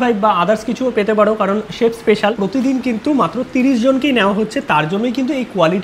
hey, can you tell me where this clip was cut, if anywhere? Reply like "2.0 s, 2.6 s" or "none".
2.4 s